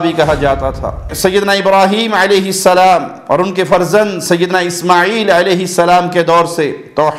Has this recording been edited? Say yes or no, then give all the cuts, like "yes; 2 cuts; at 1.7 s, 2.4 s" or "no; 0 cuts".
yes; 1 cut; at 1.1 s